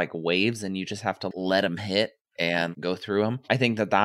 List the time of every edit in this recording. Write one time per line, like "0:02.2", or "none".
0:01.3
0:02.7